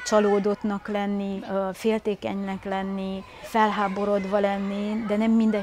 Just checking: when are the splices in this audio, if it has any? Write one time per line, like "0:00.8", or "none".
0:01.4
0:03.5